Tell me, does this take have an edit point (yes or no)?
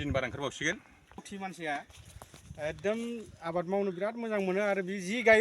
yes